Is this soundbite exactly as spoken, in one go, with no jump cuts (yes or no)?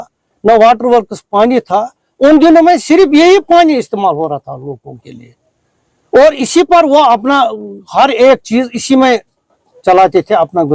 yes